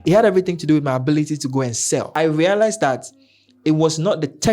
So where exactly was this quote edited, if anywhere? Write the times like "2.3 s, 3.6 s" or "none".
2.1 s